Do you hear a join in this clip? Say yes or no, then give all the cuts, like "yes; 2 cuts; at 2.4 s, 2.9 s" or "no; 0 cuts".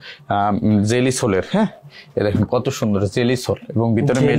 no; 0 cuts